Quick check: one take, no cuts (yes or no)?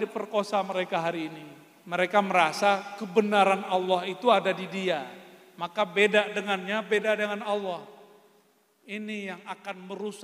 yes